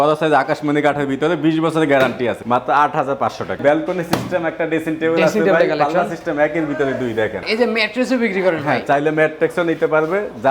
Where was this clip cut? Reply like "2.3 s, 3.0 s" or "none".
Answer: 2.4 s, 3.6 s, 7.4 s